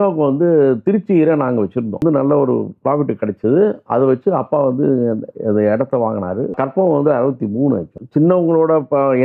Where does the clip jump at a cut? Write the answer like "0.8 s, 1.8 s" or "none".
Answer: 2.0 s, 6.5 s, 8.0 s